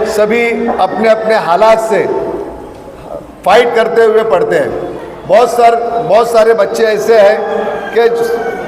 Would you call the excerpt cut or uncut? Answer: uncut